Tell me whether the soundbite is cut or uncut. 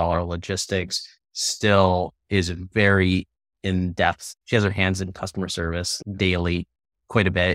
cut